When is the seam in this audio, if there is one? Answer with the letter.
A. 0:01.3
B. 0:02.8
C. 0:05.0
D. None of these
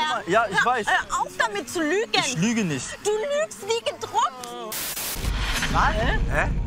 C